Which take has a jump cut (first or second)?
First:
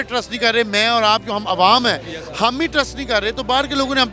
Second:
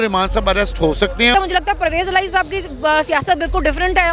second